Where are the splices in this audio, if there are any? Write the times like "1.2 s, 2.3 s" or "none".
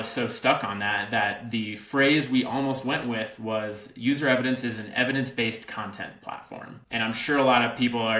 6.8 s